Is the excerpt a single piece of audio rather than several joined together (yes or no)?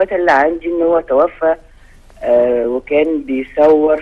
no